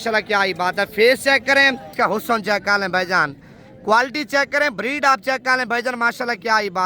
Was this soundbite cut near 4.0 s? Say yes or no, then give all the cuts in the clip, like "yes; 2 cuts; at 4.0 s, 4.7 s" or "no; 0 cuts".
no; 1 cut; at 1.9 s